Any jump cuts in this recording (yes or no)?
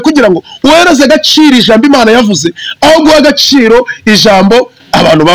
no